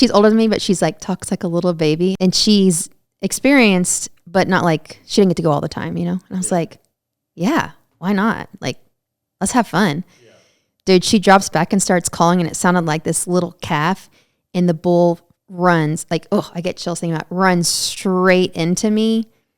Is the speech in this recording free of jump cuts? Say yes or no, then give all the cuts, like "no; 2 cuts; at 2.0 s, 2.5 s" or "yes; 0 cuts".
no; 1 cut; at 2.2 s